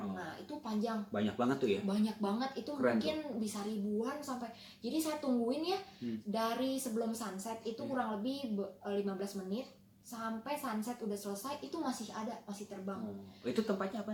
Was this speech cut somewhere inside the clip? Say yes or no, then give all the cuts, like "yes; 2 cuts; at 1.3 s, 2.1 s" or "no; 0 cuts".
no; 0 cuts